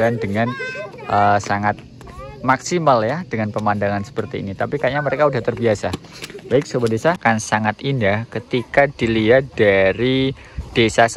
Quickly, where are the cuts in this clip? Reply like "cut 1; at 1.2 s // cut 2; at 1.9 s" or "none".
cut 1; at 7.2 s